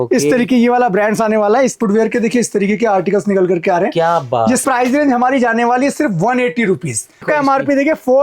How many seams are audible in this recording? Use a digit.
3